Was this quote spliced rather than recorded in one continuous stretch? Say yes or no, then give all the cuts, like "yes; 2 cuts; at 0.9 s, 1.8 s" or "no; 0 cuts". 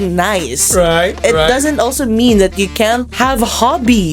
yes; 1 cut; at 3.1 s